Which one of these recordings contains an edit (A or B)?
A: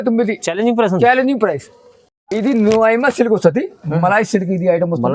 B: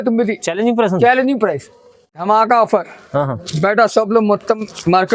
B